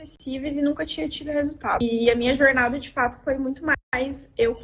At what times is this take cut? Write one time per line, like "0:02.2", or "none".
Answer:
0:01.8